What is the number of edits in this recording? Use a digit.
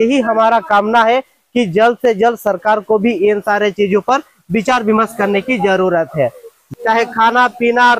1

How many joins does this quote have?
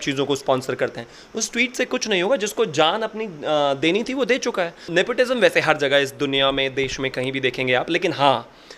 1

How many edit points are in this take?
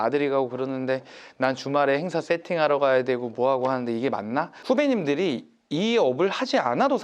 1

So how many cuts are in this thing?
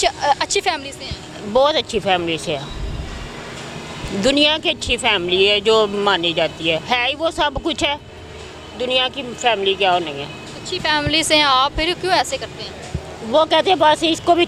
0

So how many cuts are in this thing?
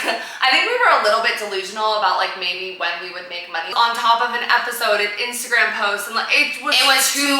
1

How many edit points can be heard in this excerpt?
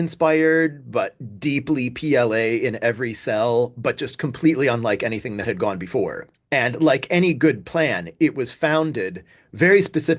1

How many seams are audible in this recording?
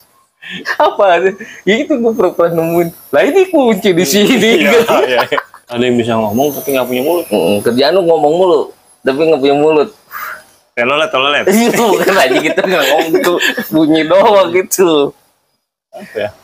1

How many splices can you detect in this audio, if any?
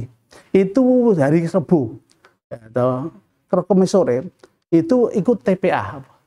0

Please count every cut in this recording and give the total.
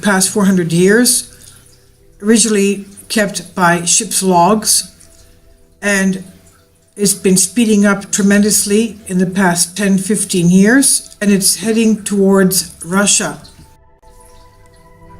1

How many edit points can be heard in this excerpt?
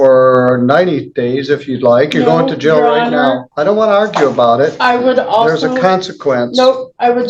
1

